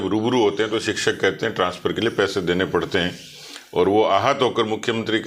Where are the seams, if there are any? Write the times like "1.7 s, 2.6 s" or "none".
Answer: none